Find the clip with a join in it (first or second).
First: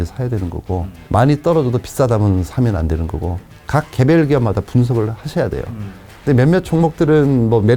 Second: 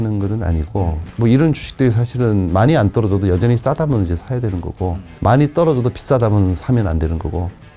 first